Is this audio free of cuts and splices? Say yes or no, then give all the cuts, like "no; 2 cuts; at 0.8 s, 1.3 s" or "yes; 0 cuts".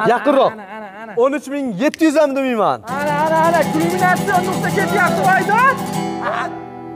yes; 0 cuts